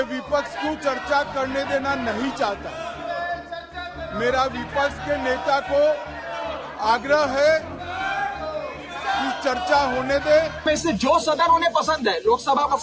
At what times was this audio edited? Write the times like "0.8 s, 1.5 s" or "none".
10.6 s